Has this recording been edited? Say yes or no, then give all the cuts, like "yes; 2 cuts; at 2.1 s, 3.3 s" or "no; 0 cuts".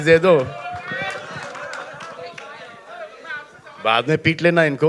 no; 0 cuts